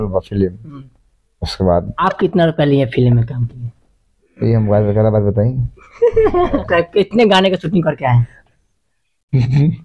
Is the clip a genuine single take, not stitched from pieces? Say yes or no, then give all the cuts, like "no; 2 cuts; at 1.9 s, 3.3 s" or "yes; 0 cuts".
no; 2 cuts; at 1.9 s, 6.6 s